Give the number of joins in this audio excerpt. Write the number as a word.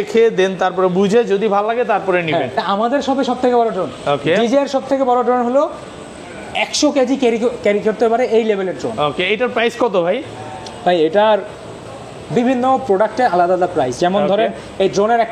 one